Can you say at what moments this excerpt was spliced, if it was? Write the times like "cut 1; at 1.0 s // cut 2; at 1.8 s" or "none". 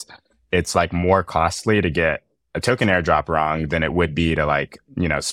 none